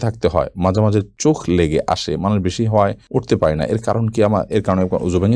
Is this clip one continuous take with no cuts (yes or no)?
yes